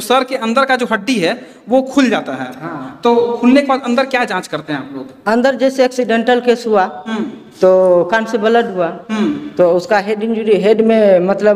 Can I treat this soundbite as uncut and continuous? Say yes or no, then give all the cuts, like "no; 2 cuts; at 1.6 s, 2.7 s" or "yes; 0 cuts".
yes; 0 cuts